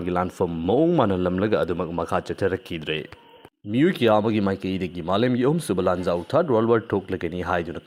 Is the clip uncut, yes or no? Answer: yes